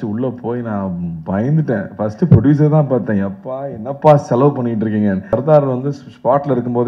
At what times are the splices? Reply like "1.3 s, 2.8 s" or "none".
5.3 s